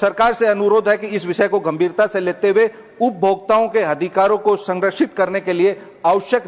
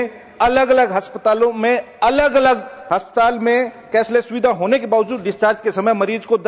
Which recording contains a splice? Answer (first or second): second